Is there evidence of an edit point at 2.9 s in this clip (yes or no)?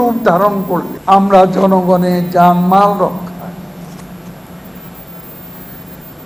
no